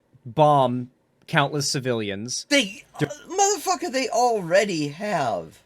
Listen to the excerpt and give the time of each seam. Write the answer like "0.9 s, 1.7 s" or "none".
2.3 s